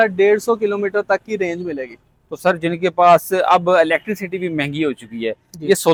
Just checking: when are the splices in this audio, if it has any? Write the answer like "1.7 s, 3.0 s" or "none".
none